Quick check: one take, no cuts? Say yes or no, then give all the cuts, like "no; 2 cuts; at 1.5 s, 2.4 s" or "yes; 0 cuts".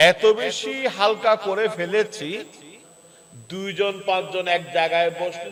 yes; 0 cuts